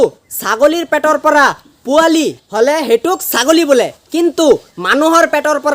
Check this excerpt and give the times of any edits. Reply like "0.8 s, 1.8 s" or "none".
2.4 s